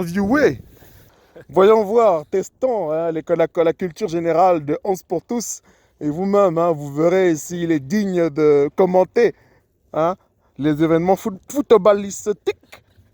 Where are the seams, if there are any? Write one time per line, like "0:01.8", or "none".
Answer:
0:01.0